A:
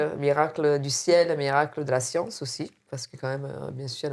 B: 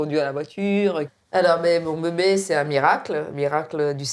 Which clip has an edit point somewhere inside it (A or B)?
B